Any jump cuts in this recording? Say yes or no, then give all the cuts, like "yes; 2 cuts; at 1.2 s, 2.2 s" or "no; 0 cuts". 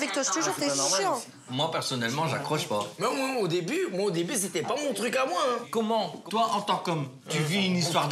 yes; 2 cuts; at 1.4 s, 5.6 s